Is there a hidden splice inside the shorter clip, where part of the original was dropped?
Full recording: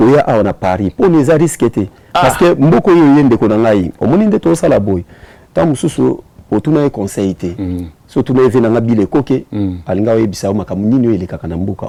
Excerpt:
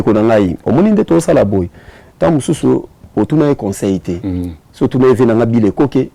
no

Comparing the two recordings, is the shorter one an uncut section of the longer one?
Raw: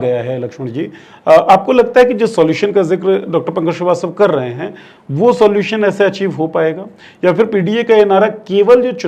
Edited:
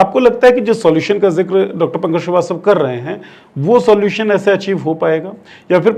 yes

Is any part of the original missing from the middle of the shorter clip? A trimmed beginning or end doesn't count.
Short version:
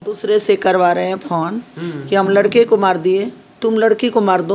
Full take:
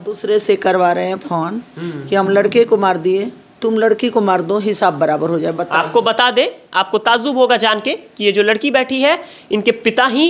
no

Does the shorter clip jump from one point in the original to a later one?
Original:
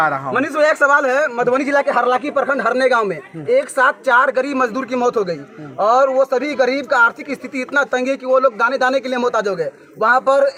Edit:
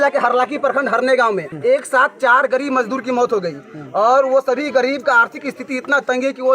yes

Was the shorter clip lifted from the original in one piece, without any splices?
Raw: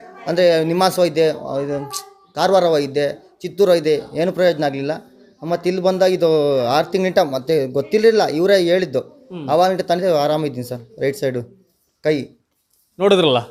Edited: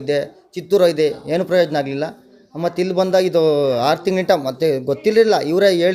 yes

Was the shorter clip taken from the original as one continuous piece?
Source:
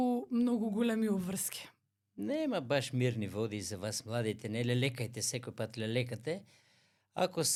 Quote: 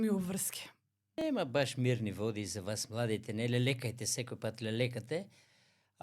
no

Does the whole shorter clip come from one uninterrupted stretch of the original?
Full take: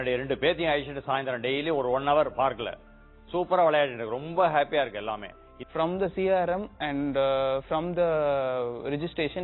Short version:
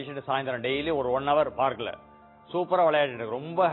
yes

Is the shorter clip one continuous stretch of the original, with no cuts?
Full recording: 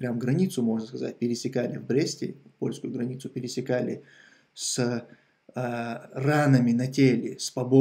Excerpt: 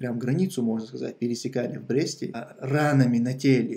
no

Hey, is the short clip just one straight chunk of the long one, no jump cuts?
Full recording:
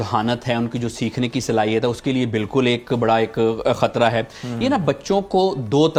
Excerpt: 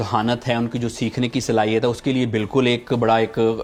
yes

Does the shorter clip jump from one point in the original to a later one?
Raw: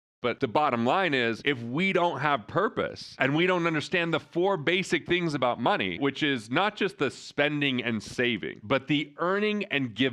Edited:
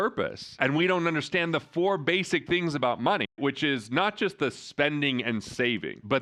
no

